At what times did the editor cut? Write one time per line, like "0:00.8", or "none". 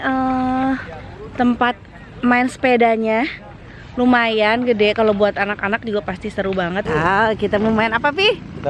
0:06.8

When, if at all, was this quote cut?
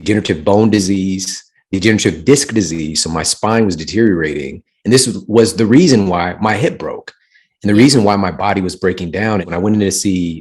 0:09.4

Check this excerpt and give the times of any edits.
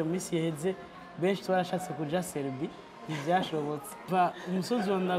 0:04.1

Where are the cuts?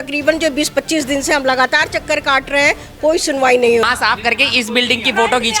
0:03.9

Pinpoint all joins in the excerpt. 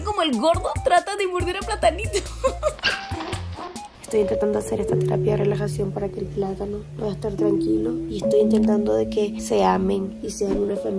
none

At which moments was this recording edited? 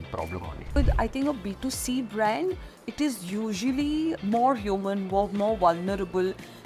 0:00.8
0:04.2

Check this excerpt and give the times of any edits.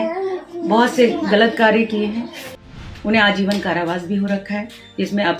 0:02.9

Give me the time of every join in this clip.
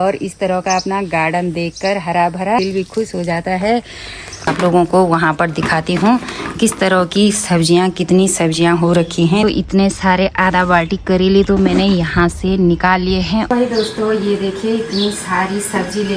0:02.6
0:04.5
0:09.4
0:13.5

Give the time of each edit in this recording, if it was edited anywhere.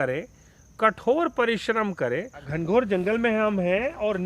0:02.4

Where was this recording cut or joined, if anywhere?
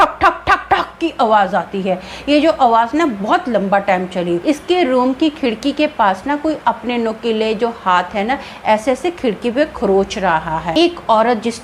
0:04.4
0:10.7

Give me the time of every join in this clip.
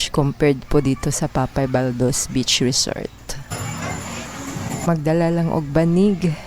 0:04.8

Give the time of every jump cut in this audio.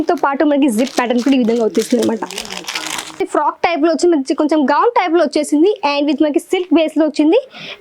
0:03.2

